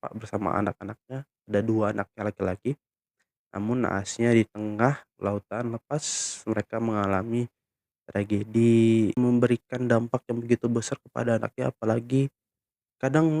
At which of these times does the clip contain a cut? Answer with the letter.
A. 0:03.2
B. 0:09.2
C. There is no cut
B